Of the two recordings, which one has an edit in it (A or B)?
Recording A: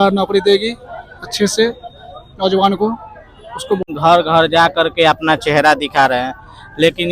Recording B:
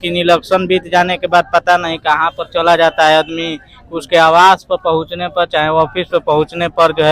A